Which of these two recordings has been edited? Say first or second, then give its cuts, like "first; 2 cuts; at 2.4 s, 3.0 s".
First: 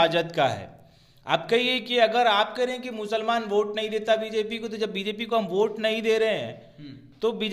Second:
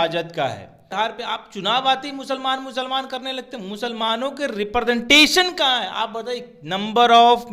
second; 1 cut; at 0.9 s